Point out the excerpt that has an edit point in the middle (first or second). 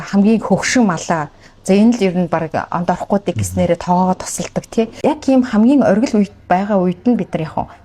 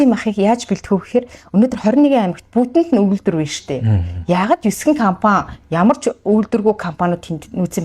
first